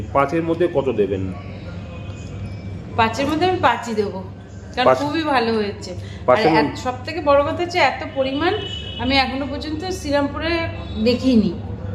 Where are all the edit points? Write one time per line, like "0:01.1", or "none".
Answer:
none